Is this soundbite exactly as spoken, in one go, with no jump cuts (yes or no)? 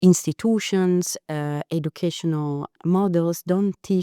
no